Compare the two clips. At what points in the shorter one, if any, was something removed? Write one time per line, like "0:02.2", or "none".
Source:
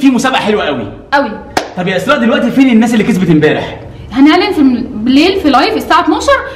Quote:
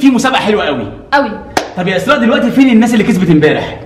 none